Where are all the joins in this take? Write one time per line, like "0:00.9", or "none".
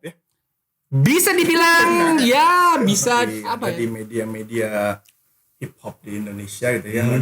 0:03.5

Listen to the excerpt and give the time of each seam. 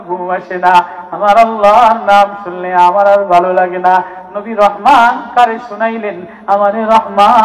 none

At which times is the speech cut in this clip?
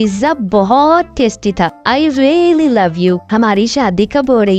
none

